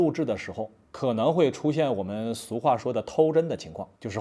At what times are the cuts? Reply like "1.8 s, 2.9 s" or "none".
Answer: none